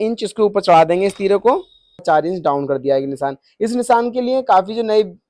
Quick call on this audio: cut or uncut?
cut